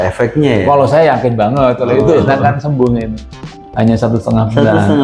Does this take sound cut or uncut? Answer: cut